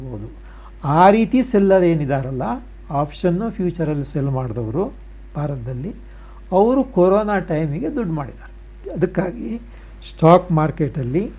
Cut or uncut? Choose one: uncut